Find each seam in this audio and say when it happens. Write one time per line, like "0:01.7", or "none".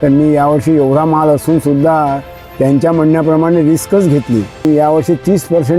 0:04.7